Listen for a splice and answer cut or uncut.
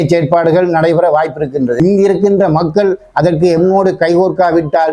cut